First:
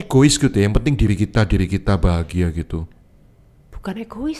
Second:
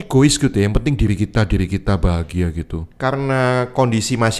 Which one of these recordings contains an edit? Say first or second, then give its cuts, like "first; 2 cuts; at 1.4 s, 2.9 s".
second; 1 cut; at 2.9 s